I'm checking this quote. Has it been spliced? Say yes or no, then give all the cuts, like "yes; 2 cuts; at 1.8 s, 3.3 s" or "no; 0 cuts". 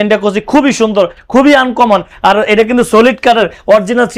no; 0 cuts